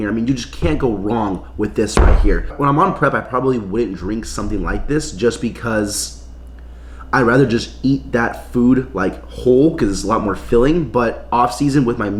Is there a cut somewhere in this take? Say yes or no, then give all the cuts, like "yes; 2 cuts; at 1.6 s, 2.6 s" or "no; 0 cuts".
no; 0 cuts